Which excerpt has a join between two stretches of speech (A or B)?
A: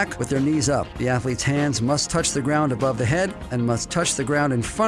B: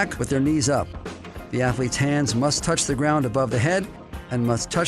A